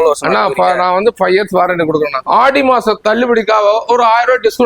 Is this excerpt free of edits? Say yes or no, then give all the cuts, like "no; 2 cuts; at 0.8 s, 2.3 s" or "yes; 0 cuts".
no; 1 cut; at 2.2 s